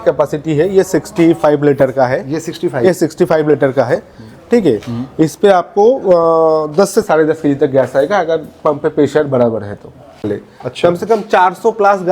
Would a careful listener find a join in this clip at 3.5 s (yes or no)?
no